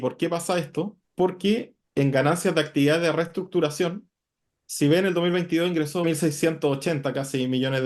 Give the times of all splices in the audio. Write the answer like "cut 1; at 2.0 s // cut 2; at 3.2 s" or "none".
cut 1; at 1.0 s // cut 2; at 1.8 s // cut 3; at 6.1 s